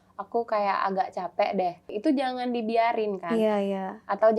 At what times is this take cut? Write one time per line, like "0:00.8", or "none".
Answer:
0:01.9